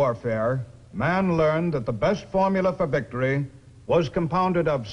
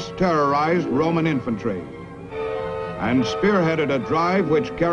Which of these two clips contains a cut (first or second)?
first